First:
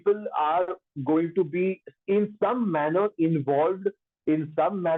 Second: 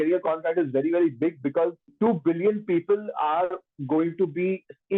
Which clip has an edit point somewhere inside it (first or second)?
second